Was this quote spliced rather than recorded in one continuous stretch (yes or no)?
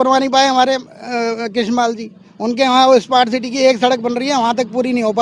no